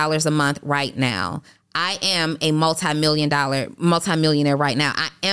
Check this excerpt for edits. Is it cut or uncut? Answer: uncut